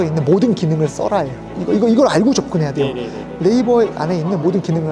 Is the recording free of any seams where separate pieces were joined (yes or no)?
yes